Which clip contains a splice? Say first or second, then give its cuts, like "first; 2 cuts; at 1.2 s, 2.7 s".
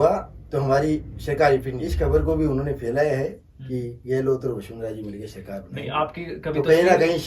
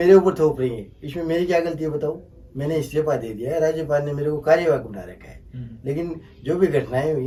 first; 1 cut; at 1.8 s